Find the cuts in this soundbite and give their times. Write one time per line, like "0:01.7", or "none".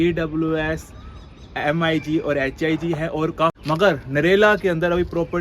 0:03.6